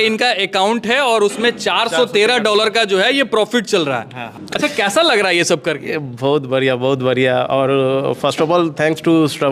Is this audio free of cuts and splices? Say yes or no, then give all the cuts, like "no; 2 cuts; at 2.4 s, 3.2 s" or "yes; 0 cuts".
yes; 0 cuts